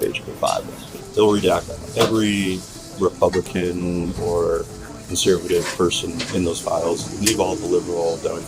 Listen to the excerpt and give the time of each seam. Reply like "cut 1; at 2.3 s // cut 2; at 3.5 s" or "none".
cut 1; at 0.9 s